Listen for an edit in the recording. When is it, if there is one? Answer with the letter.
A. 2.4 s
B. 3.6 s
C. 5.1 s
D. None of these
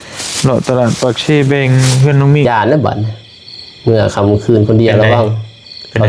A